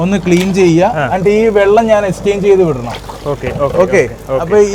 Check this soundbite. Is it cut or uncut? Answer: uncut